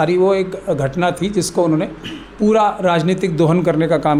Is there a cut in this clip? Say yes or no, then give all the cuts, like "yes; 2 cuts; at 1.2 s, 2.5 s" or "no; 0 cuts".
no; 0 cuts